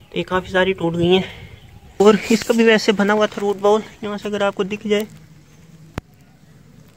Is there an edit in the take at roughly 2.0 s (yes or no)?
yes